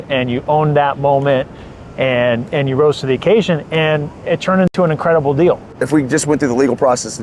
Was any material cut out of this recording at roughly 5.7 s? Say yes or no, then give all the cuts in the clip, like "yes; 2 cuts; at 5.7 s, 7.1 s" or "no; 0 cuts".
yes; 1 cut; at 5.7 s